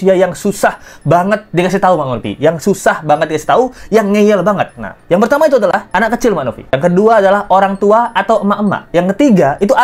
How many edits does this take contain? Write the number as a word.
zero